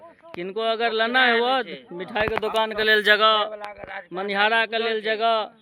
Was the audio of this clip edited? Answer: no; 0 cuts

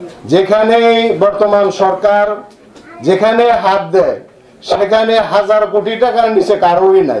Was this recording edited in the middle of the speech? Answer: no; 0 cuts

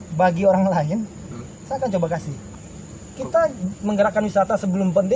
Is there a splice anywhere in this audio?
yes; 1 cut; at 2.4 s

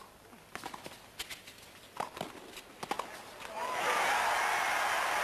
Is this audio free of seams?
no; 1 cut; at 2.2 s

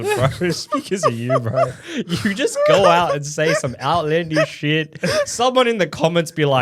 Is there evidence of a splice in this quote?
no; 0 cuts

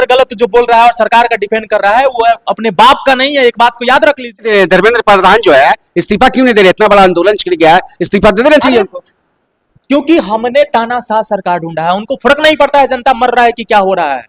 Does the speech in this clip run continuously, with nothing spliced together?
no; 1 cut; at 4.5 s

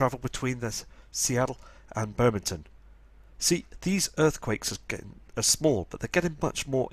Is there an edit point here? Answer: no; 0 cuts

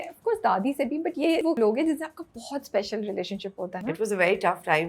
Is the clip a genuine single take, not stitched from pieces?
no; 2 cuts; at 1.6 s, 3.7 s

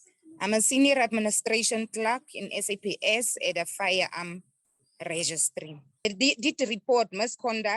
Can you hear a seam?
yes; 1 cut; at 6.0 s

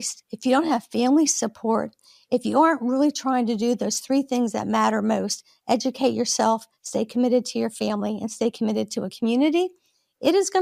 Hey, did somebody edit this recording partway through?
no; 0 cuts

